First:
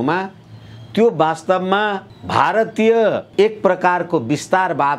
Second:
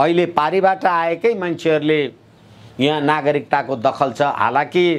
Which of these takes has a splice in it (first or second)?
first